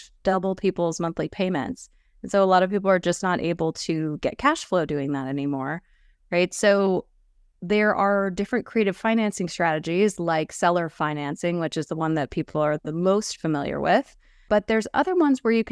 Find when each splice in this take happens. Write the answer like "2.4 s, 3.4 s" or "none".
14.5 s

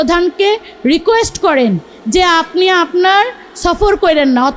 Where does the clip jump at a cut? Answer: none

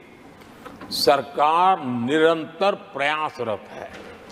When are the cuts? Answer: none

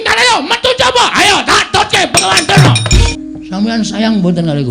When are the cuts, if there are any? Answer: 3.1 s

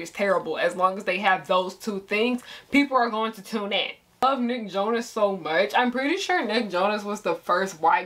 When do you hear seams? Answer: 4.2 s

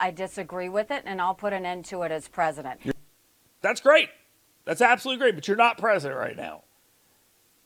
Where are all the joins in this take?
none

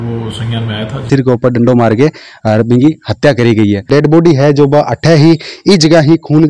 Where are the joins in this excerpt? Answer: 1.1 s, 3.9 s

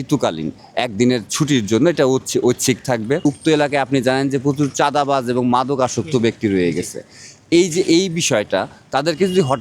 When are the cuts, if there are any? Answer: 3.2 s

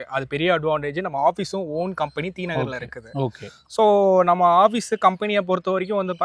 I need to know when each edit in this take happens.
none

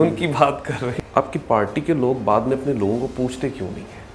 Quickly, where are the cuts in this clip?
0.9 s

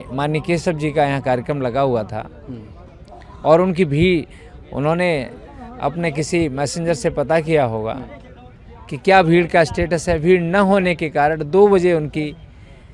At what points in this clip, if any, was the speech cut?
none

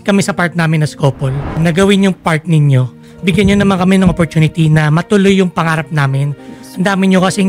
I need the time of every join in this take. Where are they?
1.6 s, 3.0 s

